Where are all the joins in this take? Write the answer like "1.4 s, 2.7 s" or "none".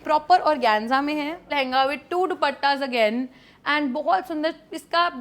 1.4 s